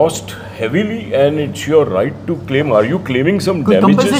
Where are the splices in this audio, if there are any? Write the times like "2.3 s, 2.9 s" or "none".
none